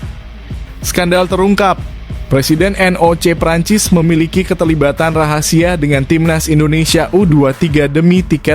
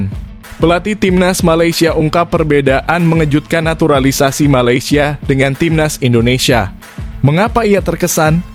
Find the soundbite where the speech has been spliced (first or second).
first